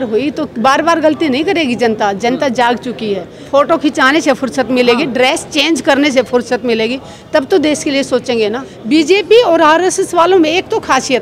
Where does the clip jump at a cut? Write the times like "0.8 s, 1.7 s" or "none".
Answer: 3.3 s, 8.7 s